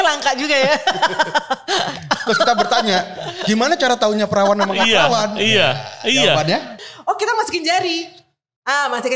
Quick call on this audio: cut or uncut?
cut